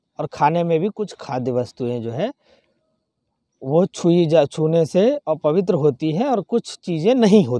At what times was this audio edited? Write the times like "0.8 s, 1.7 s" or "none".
none